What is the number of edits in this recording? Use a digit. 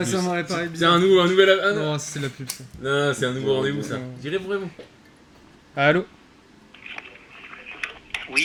0